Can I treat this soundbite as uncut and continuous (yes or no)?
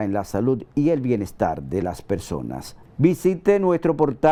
yes